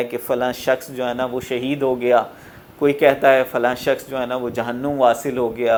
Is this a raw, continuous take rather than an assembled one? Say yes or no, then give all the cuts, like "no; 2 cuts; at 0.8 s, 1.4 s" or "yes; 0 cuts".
yes; 0 cuts